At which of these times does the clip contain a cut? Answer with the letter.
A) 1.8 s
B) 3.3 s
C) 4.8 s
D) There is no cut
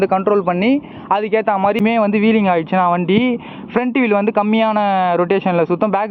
A